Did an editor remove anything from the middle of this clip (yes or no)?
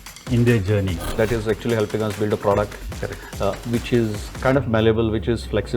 yes